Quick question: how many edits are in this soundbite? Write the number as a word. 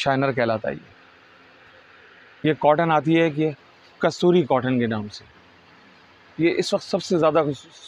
one